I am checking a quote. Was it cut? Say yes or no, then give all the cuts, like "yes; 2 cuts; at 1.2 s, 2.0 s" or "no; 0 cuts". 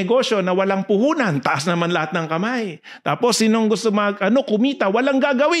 no; 0 cuts